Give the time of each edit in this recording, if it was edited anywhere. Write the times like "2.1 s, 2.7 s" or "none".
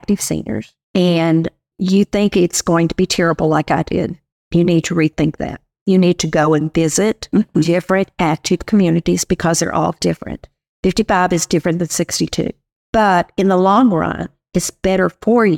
none